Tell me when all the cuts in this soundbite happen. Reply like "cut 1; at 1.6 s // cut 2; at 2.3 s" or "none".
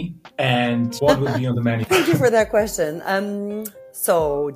cut 1; at 0.9 s // cut 2; at 1.8 s

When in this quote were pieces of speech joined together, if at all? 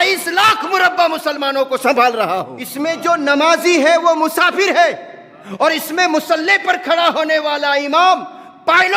cut 1; at 2.6 s

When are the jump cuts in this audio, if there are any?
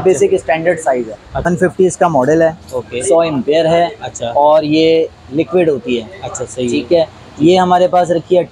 cut 1; at 1.5 s

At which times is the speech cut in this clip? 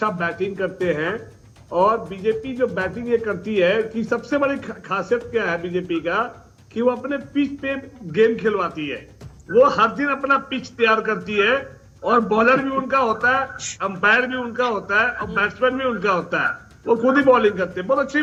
none

